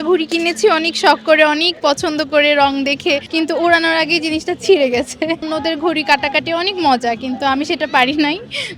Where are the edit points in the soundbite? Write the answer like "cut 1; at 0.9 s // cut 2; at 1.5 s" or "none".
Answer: cut 1; at 3.3 s // cut 2; at 5.4 s